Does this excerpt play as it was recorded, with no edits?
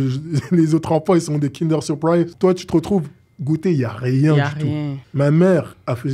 no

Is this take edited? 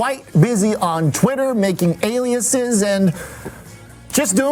no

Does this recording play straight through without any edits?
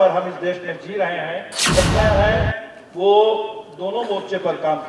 no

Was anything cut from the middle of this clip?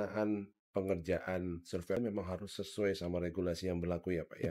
yes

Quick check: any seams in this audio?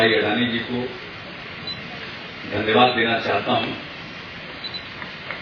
no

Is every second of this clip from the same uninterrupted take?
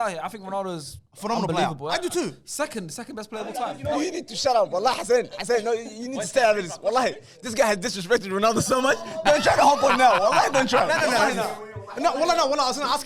yes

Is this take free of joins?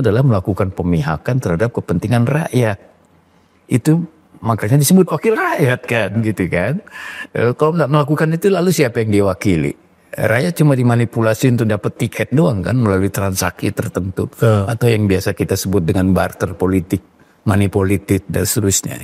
yes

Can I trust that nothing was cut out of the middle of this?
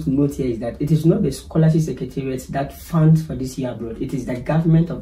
yes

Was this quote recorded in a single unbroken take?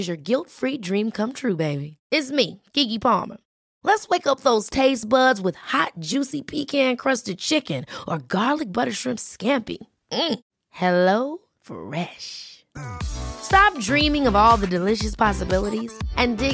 yes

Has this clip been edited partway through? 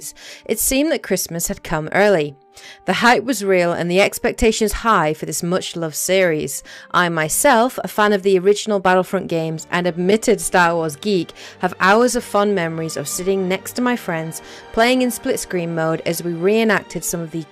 yes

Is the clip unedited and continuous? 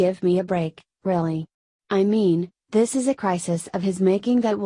no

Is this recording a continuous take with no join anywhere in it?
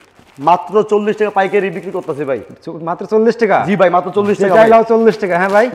yes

